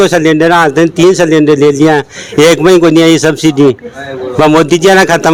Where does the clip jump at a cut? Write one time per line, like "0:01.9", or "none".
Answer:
none